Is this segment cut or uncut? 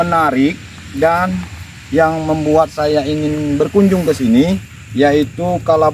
uncut